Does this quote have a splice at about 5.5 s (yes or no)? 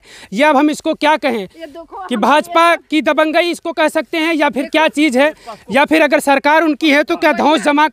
no